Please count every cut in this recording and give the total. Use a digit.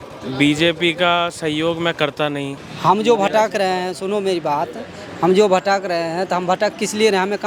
1